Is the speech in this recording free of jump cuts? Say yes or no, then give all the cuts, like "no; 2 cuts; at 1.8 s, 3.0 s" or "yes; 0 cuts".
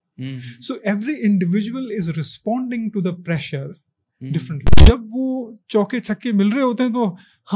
no; 1 cut; at 4.8 s